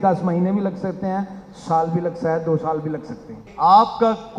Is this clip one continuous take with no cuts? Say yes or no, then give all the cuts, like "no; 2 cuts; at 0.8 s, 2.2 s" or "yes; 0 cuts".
no; 1 cut; at 3.4 s